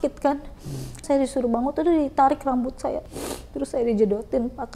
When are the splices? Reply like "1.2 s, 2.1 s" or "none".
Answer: 1.0 s, 3.0 s